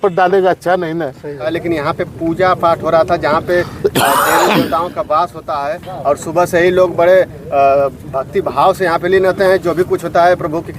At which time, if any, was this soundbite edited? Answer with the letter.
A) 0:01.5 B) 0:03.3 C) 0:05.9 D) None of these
A